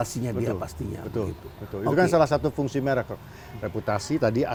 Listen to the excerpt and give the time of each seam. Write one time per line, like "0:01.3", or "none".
none